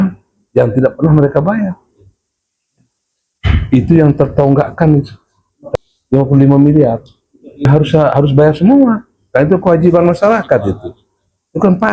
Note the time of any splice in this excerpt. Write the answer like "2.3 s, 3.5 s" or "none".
5.6 s, 7.5 s